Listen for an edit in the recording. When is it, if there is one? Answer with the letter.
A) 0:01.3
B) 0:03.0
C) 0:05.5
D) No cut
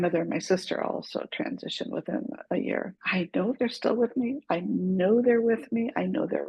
B